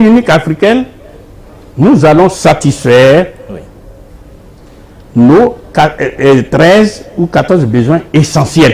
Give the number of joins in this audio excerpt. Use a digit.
0